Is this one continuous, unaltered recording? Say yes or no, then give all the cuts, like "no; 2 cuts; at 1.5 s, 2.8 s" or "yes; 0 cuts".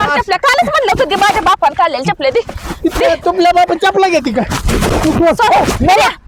yes; 0 cuts